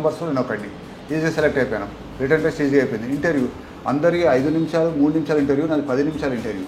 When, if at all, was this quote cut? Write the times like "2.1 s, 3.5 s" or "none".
none